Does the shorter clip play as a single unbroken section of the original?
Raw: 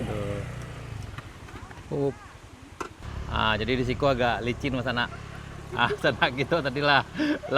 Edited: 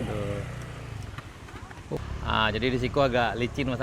no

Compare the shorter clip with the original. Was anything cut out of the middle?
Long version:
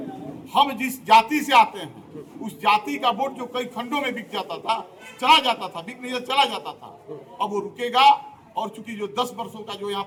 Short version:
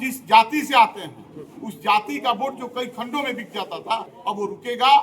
yes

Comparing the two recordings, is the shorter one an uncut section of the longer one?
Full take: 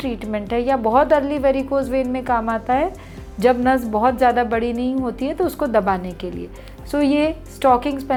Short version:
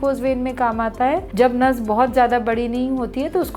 no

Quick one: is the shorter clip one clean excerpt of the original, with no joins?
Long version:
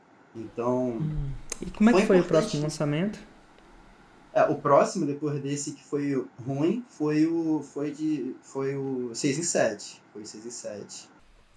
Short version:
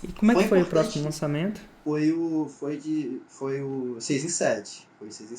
no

